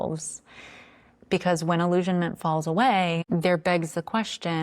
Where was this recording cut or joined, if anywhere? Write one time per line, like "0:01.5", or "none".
0:03.2